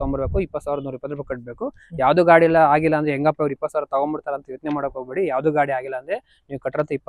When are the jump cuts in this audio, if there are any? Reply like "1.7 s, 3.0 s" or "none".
none